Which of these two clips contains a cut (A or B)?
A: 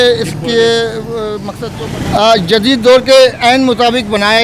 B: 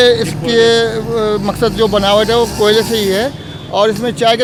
A